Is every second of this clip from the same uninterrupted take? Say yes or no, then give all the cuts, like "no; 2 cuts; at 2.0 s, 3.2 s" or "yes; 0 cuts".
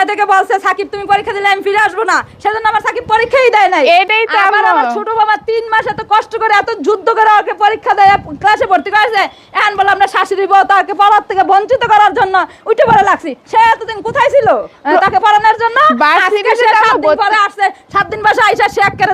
yes; 0 cuts